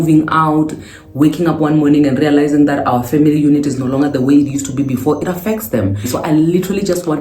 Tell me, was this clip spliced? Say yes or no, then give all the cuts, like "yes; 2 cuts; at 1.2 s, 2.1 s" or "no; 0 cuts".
yes; 1 cut; at 6.1 s